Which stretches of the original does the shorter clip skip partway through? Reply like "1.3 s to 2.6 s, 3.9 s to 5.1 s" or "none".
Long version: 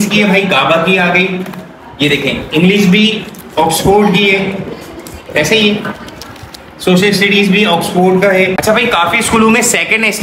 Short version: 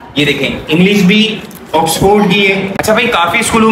4.6 s to 8.6 s

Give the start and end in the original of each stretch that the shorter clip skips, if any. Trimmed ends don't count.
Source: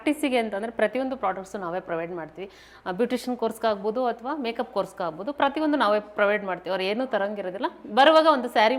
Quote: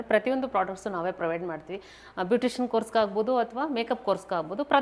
none

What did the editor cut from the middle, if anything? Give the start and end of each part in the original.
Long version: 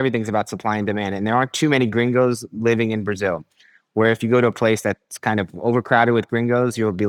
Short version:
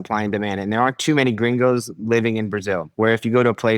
3.4 s to 3.8 s

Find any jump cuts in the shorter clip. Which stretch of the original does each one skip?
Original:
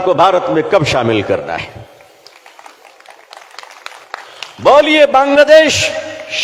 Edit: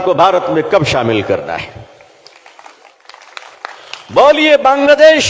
3.0 s to 3.5 s

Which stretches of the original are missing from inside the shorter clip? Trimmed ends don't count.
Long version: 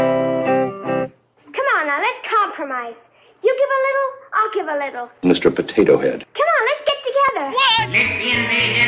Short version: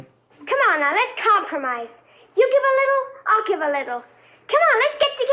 5.2 s to 6.0 s

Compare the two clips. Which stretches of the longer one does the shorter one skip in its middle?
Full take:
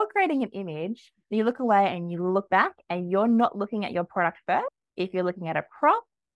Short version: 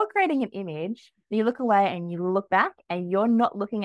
none

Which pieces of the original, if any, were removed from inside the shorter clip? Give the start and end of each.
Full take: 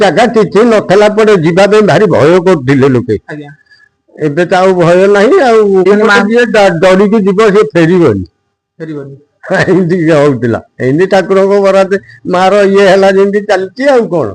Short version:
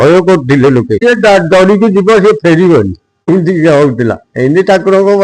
3.2 s to 6.3 s, 8.6 s to 9.7 s

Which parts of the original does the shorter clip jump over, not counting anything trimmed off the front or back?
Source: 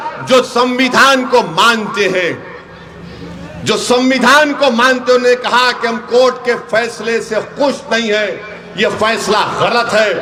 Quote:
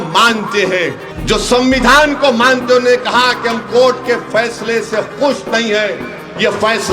2.5 s to 3.5 s

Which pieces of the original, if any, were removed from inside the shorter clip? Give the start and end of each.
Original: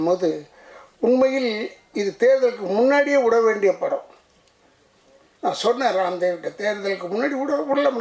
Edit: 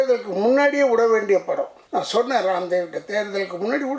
4.1 s to 5.3 s

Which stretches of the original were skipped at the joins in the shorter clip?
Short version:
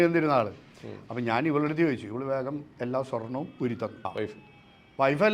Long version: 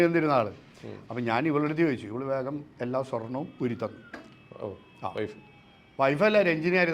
4.0 s to 5.0 s

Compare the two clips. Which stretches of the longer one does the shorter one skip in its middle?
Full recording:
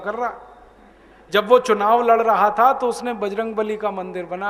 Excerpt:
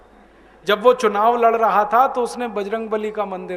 none

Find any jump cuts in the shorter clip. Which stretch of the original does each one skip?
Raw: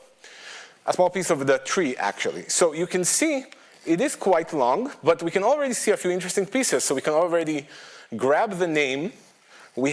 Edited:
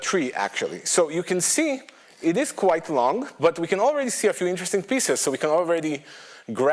none

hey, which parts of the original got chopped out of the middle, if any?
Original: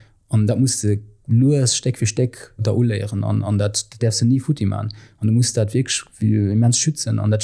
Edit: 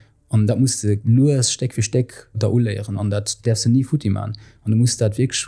1.0 s to 1.2 s, 3.4 s to 3.7 s

